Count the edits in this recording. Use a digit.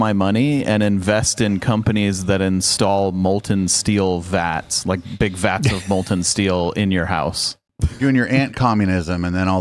1